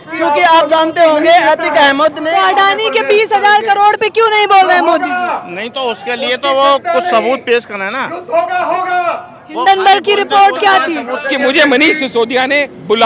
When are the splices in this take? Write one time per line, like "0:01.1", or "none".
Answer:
0:02.2
0:11.2